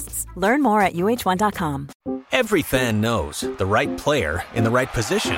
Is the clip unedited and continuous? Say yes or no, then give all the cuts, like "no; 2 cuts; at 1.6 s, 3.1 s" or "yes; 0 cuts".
no; 1 cut; at 1.9 s